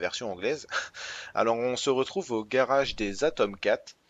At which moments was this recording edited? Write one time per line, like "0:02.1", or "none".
none